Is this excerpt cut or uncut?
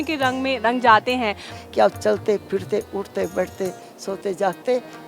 cut